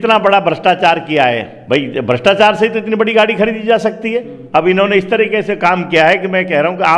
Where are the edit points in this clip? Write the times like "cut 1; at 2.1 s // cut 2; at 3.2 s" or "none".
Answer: cut 1; at 1.5 s // cut 2; at 4.4 s